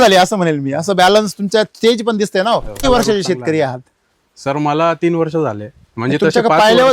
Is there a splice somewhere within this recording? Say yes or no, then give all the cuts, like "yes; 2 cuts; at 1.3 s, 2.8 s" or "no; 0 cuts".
yes; 1 cut; at 2.8 s